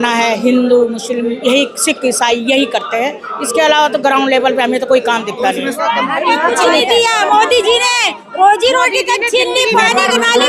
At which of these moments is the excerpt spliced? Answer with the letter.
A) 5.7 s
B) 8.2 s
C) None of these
A